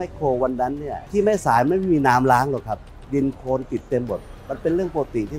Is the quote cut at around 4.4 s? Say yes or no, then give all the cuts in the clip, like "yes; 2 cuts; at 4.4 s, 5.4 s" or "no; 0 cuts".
no; 2 cuts; at 0.9 s, 2.9 s